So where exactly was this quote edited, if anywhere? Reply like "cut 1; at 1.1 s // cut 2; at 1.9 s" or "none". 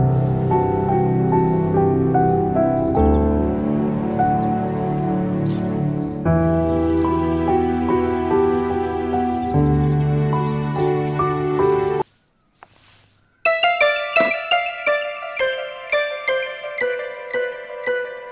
cut 1; at 12.0 s